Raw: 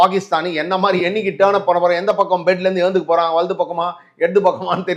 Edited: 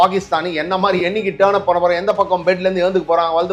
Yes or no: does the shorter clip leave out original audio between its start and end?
no